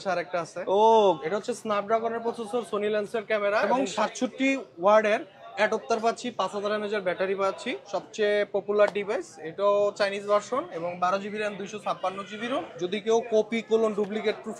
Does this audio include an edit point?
yes; 3 cuts; at 1.2 s, 7.7 s, 12.7 s

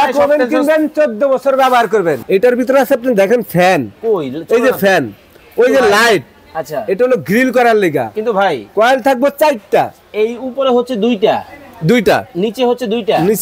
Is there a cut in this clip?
yes; 1 cut; at 2.2 s

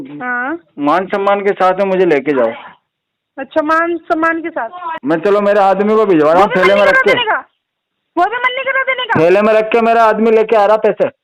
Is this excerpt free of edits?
no; 1 cut; at 4.8 s

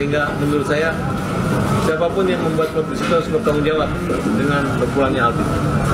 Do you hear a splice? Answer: no; 0 cuts

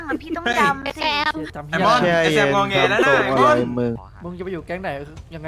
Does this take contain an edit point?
yes; 1 cut; at 4.1 s

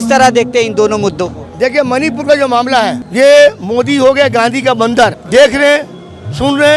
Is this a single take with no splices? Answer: no; 2 cuts; at 3.0 s, 5.2 s

